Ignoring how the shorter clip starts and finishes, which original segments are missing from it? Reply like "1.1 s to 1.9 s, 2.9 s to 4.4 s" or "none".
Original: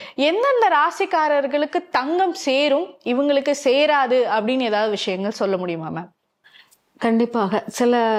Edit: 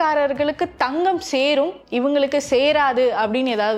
none